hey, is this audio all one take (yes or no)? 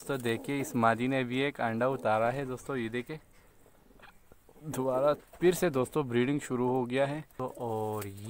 no